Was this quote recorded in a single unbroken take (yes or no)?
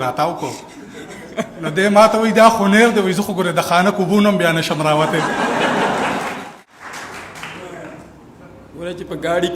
no